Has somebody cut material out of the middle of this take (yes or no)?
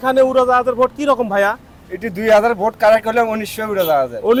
no